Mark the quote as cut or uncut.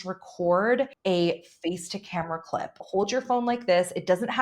cut